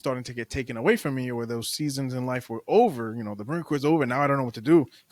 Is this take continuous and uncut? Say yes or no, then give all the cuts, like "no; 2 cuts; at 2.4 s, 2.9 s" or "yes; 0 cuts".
yes; 0 cuts